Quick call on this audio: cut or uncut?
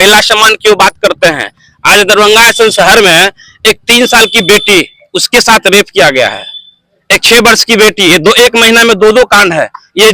uncut